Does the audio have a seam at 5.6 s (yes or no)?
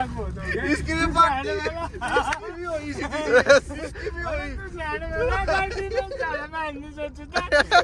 no